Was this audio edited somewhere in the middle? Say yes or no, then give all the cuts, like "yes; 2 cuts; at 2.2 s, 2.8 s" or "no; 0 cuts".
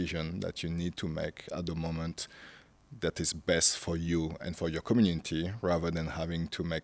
no; 0 cuts